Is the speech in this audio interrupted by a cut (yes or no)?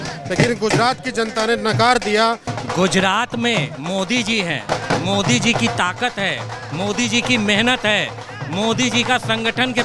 yes